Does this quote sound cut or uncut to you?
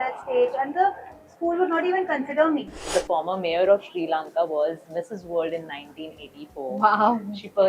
cut